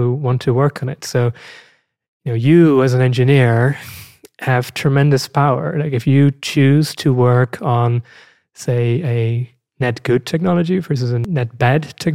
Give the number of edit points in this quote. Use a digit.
1